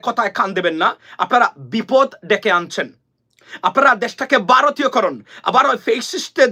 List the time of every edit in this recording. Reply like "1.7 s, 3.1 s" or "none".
none